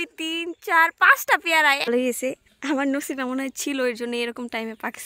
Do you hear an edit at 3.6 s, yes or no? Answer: no